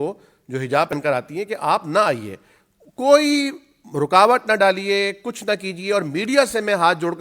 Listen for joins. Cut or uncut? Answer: cut